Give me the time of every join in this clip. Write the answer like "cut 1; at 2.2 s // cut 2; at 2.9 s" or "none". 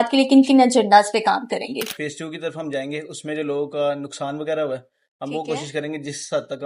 cut 1; at 1.8 s